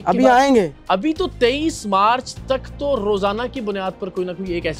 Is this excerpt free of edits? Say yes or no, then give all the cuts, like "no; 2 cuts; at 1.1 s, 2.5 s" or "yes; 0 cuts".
yes; 0 cuts